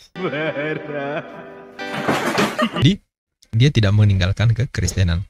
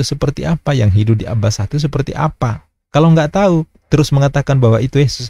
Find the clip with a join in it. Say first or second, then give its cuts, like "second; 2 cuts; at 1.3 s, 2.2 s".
first; 1 cut; at 2.8 s